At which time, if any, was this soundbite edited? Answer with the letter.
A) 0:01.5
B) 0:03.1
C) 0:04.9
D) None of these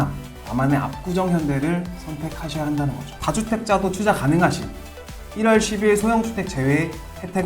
B